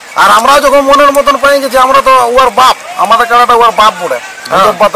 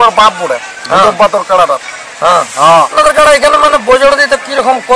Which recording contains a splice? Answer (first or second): second